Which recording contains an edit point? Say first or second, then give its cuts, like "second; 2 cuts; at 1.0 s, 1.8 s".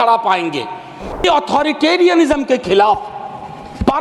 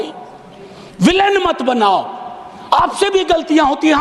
first; 1 cut; at 1.2 s